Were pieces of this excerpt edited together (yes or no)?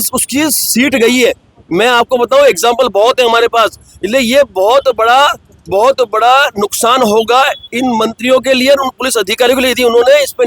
no